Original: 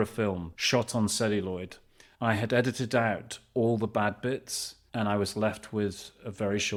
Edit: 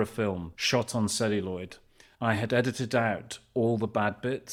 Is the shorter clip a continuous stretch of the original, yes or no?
yes